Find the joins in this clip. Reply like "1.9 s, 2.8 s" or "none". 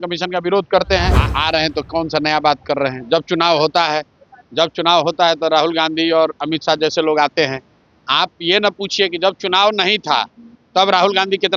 1.2 s